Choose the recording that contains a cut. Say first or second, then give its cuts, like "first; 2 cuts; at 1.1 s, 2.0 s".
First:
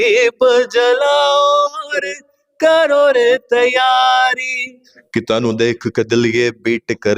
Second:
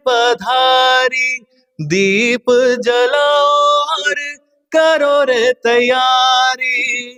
first; 1 cut; at 4.9 s